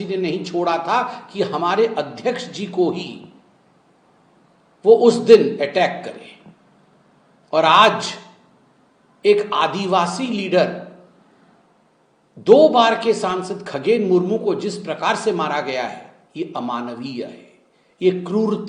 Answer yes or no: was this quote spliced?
no